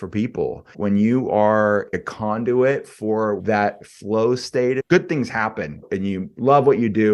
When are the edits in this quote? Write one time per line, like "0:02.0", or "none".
0:00.8
0:02.0
0:03.4
0:04.8
0:05.8